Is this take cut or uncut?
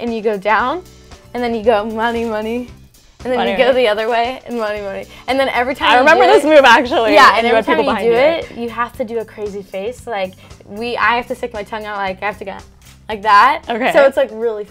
uncut